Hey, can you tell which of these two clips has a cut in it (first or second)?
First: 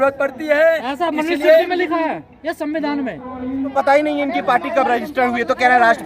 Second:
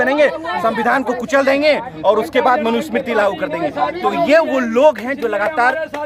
first